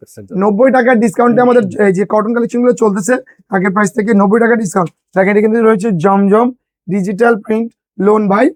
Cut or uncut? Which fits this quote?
uncut